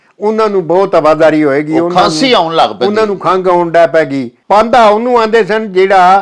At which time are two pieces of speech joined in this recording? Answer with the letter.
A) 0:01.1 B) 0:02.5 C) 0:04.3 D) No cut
C